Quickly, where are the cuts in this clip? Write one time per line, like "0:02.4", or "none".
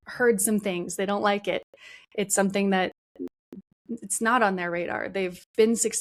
none